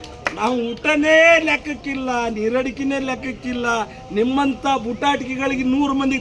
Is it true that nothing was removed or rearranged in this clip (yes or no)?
yes